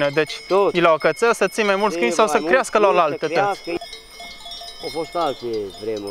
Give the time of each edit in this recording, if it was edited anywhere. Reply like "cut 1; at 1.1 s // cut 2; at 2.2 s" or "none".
cut 1; at 3.8 s